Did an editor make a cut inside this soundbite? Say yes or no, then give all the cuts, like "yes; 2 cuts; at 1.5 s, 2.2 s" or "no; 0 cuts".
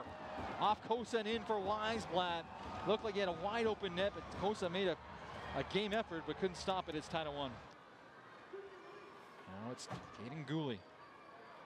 no; 0 cuts